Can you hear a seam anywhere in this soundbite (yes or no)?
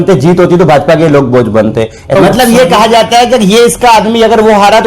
yes